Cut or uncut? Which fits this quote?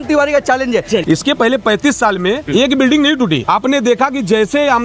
cut